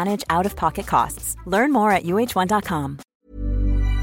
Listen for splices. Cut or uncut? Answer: cut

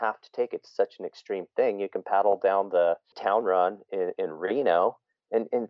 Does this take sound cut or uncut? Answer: cut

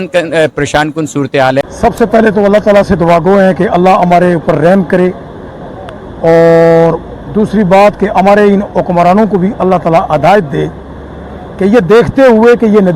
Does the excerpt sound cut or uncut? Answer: cut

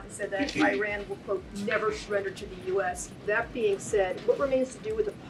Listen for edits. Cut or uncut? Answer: uncut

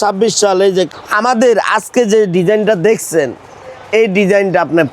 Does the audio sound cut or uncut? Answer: cut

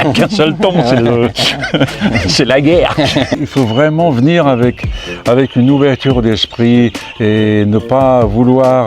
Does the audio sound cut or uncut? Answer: cut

